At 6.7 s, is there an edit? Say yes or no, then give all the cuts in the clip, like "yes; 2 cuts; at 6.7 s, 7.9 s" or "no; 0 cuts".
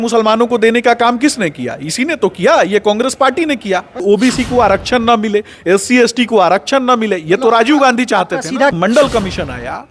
no; 2 cuts; at 4.0 s, 8.7 s